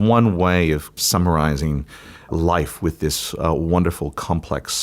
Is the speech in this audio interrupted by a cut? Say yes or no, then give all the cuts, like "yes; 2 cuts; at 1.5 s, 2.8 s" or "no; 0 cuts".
yes; 1 cut; at 1.0 s